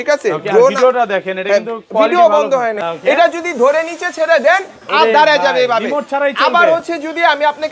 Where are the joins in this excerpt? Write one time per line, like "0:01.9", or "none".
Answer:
0:02.8